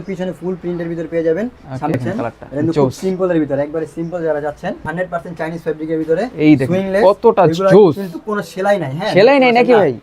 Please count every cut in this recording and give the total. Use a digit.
2